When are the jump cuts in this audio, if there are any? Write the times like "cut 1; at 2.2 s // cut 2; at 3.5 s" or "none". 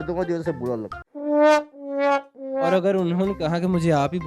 none